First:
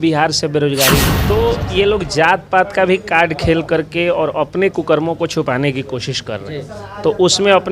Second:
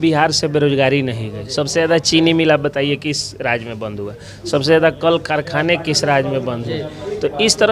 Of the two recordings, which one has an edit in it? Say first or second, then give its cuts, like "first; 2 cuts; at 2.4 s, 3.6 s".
first; 1 cut; at 1.1 s